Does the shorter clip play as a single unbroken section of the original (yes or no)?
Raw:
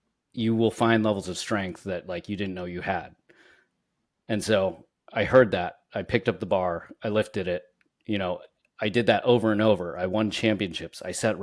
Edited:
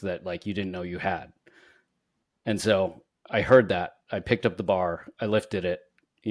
yes